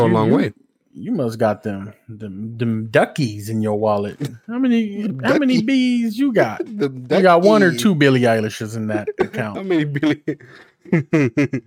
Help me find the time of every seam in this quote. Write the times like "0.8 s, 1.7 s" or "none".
none

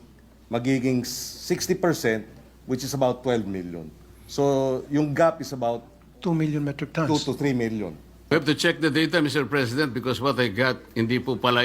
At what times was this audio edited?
8.3 s

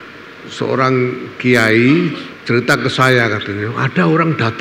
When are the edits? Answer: 2.3 s

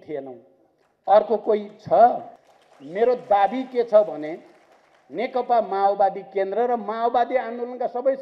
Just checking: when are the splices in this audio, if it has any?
2.3 s

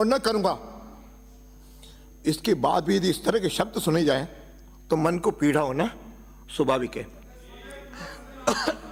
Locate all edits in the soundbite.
none

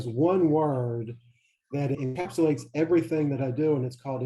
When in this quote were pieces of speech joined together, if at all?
2.0 s

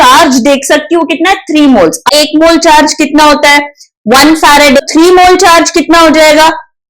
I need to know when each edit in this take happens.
2.1 s, 4.8 s

